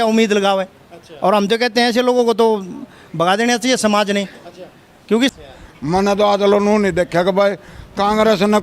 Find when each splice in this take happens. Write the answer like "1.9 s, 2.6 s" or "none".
5.3 s